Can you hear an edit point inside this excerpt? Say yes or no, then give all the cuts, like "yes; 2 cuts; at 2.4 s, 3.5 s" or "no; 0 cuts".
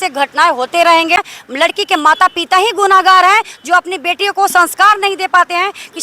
yes; 1 cut; at 1.2 s